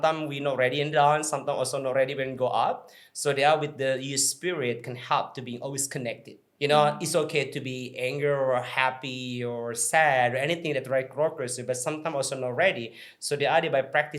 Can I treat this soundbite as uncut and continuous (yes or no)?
yes